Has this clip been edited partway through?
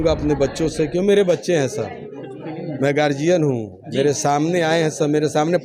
no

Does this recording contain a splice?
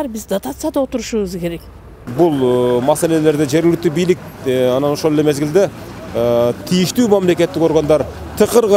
yes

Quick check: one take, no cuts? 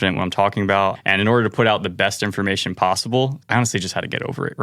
no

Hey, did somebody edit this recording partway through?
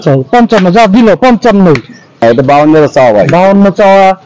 yes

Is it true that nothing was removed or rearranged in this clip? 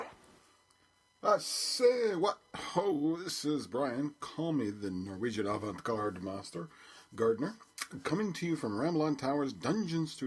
no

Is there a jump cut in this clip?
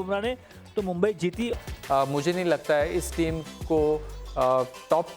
yes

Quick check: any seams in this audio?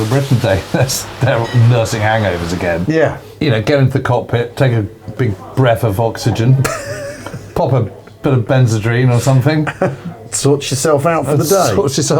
yes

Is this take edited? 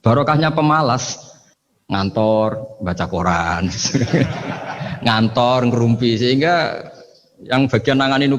no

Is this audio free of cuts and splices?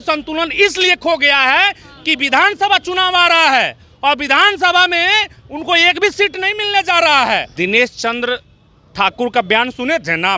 no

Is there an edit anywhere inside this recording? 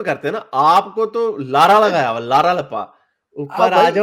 no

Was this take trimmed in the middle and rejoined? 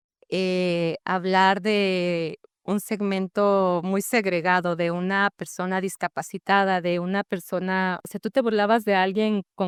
no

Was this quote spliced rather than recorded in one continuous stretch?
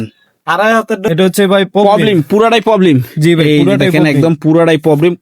yes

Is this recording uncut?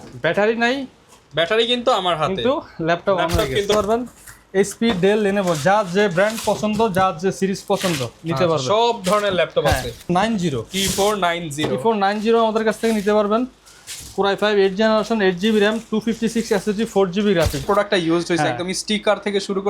no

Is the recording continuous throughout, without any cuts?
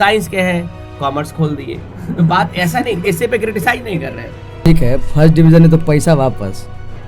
no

